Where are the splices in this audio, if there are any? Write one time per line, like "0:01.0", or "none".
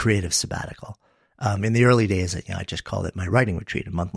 none

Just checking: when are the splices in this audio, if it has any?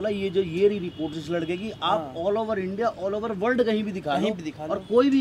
none

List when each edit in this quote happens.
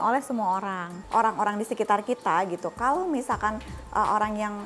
0:00.9

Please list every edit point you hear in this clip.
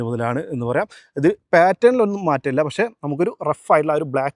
none

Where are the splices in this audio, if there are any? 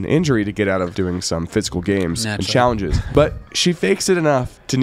0:00.9
0:03.0

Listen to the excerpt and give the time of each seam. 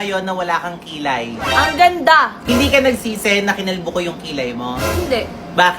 0:02.4

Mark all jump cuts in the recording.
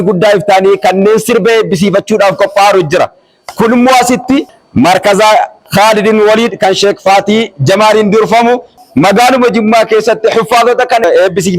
0:04.5
0:08.8

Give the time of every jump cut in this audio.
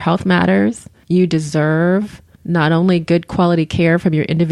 0:00.9

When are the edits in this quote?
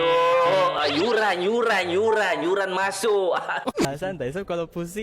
0:03.8

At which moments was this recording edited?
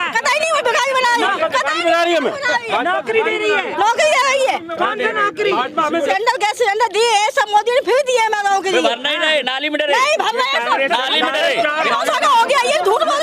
0:06.1
0:11.9

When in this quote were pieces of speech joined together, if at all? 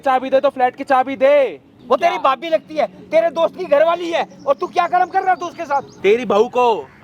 0:01.7
0:06.0

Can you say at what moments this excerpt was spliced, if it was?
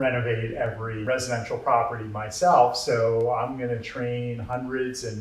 0:01.0

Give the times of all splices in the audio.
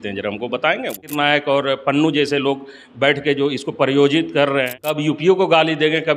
0:01.1
0:04.7

